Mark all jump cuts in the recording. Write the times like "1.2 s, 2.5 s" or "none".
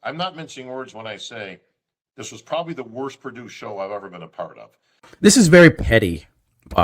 5.0 s